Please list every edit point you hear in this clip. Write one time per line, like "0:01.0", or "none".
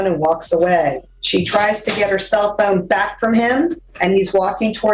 0:01.1
0:03.9